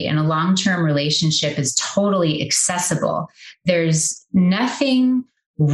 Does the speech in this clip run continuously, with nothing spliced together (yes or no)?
yes